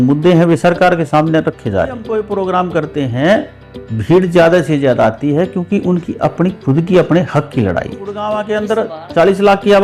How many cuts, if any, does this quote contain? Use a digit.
2